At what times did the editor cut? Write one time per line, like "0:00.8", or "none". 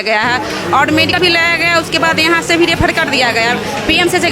0:01.2

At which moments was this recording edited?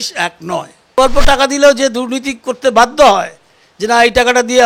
0:00.9

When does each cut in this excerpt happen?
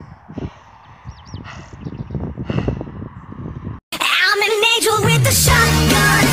none

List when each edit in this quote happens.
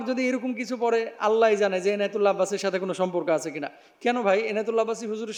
none

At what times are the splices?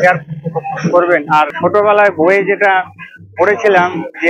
0:01.6

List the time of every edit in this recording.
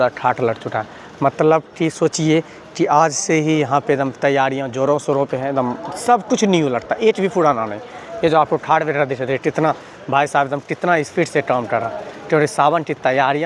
none

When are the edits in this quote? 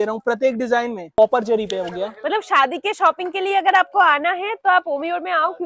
0:01.2

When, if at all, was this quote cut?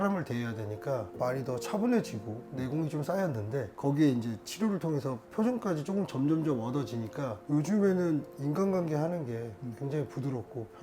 0:01.1

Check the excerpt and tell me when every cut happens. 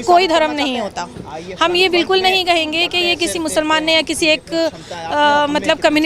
none

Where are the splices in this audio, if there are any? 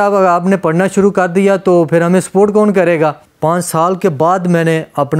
0:03.3

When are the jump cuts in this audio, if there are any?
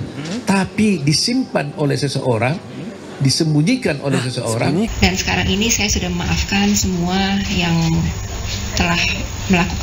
0:04.9

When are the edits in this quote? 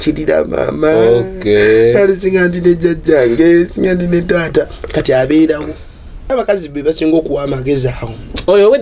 0:06.3

